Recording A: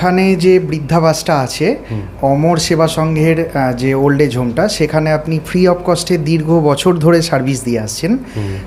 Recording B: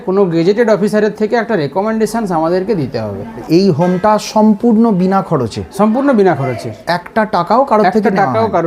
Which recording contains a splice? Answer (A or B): B